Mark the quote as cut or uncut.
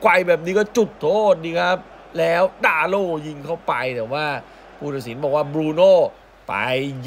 uncut